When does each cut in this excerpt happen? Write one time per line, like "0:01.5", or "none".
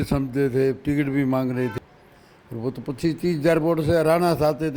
0:01.7